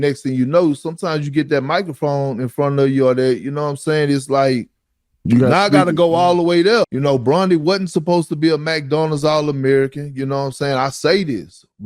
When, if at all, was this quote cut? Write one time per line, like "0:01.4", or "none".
0:06.9